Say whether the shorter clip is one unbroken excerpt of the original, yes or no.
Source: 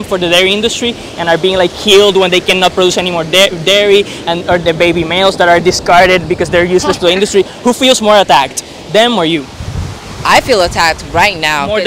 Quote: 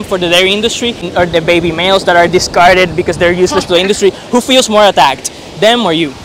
no